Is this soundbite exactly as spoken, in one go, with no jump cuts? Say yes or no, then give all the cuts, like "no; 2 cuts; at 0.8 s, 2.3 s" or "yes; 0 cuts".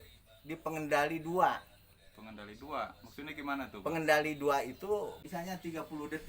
no; 1 cut; at 5.2 s